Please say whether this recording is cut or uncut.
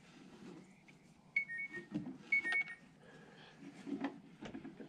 uncut